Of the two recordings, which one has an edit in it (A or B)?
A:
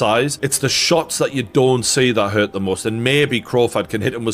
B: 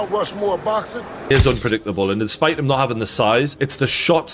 B